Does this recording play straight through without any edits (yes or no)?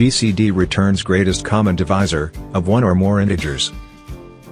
no